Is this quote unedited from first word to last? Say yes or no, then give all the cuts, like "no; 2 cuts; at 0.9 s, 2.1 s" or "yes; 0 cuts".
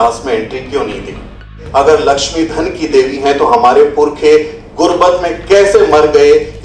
no; 1 cut; at 1.6 s